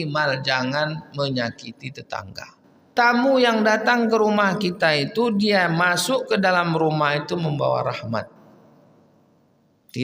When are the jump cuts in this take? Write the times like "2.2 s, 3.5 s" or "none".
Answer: 2.9 s